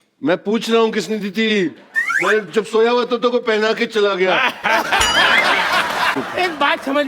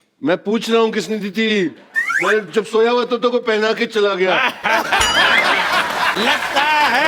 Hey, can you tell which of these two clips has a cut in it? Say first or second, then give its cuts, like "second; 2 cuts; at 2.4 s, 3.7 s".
first; 1 cut; at 6.1 s